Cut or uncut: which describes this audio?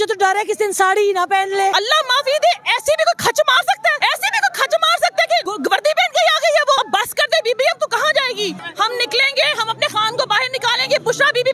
cut